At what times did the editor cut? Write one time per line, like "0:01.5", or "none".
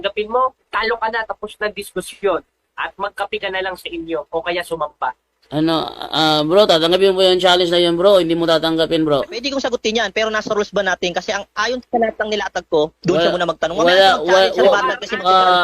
0:09.4